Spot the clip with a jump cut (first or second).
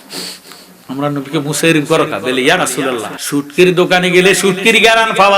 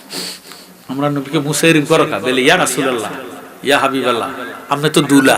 first